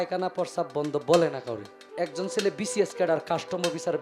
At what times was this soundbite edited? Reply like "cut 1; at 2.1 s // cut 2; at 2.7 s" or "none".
cut 1; at 1.8 s